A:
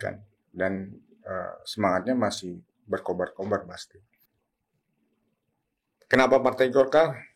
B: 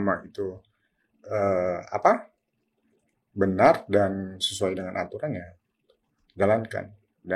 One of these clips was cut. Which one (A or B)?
A